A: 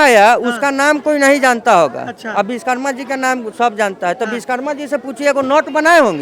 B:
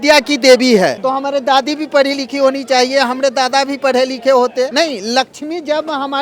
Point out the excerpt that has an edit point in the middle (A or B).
B